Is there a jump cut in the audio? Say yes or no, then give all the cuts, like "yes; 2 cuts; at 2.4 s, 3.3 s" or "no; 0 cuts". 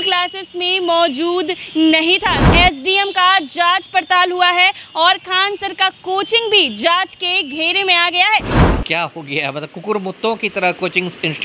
yes; 2 cuts; at 2.5 s, 8.6 s